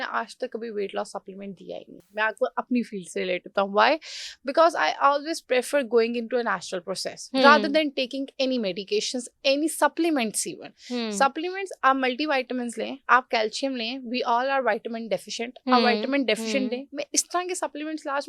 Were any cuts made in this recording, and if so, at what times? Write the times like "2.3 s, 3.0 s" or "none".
none